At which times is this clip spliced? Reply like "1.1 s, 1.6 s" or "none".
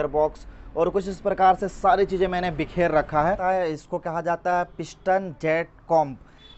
3.4 s

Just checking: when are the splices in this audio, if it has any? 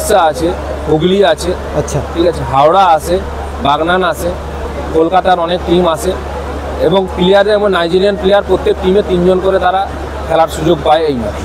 none

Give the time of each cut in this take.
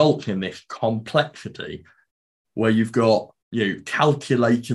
2.1 s, 3.4 s

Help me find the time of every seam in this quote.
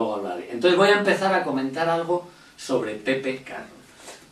1.8 s

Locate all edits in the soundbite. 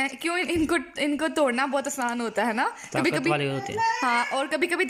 none

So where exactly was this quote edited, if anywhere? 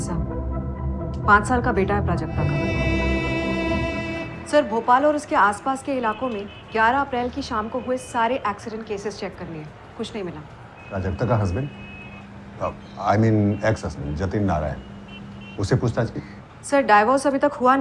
2.6 s

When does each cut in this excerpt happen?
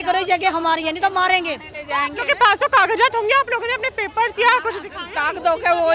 none

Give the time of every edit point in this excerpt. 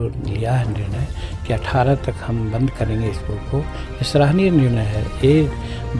none

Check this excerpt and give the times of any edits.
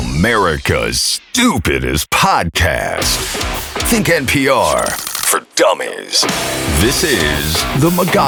none

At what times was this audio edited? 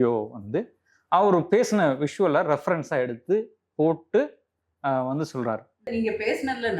5.9 s

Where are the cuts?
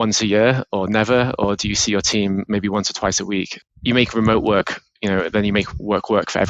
3.6 s

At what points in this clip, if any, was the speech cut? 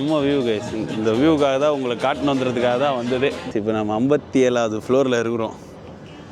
3.5 s

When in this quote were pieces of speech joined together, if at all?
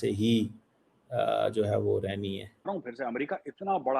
2.7 s

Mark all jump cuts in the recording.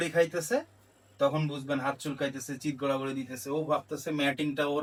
none

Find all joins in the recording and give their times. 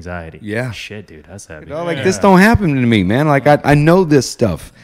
1.9 s

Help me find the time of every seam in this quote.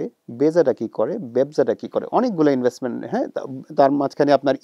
none

